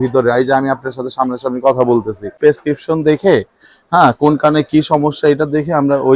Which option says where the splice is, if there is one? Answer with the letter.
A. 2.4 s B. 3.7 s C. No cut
A